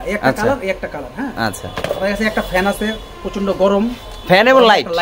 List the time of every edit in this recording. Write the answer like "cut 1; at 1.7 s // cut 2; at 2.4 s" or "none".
none

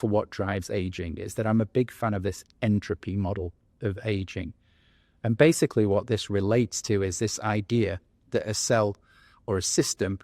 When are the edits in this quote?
none

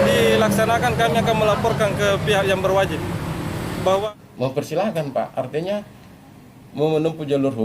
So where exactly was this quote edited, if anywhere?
cut 1; at 4.0 s

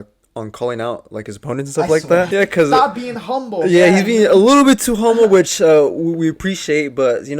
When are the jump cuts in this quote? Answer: cut 1; at 2.3 s

